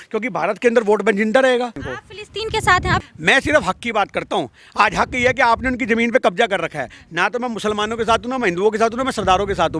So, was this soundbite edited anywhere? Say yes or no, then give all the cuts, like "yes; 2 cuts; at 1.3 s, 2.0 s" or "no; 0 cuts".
yes; 2 cuts; at 1.8 s, 3.1 s